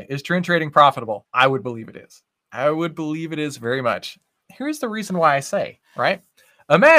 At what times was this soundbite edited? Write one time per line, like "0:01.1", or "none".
0:01.3